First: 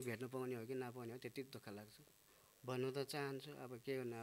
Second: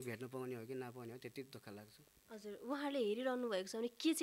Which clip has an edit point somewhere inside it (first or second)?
first